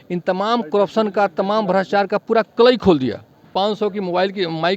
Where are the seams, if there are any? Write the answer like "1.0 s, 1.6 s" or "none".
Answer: 3.5 s